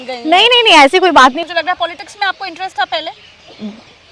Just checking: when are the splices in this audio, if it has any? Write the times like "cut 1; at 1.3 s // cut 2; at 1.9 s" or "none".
cut 1; at 1.4 s